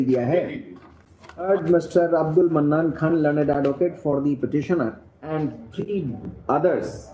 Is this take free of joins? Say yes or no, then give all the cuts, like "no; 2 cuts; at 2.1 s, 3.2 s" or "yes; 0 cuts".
no; 2 cuts; at 1.5 s, 5.1 s